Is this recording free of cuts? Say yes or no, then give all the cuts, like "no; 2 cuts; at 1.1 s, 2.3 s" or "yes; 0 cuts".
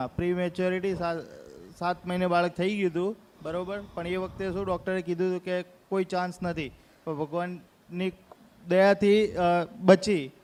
yes; 0 cuts